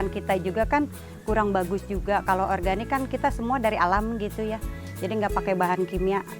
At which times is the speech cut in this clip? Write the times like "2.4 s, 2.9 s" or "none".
2.2 s